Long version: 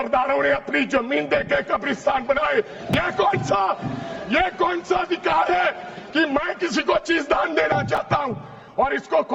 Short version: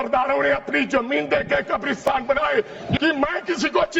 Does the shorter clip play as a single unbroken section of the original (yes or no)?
no